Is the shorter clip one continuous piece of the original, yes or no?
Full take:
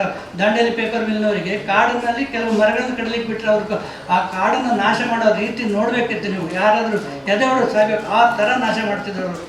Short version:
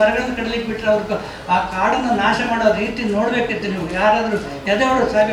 yes